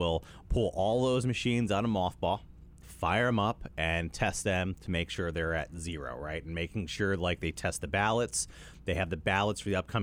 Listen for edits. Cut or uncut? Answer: uncut